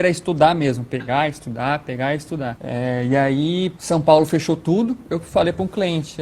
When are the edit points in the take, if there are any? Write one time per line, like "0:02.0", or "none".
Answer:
0:02.6
0:03.8